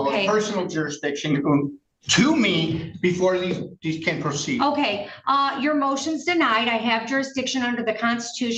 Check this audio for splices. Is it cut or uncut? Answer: uncut